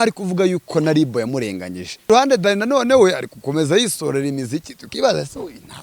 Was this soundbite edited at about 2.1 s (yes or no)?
yes